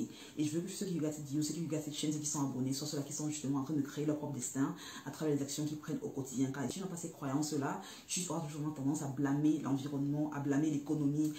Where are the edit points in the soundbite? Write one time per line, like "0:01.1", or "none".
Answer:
0:06.7